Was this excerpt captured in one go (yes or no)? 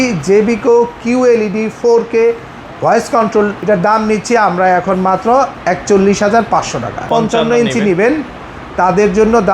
no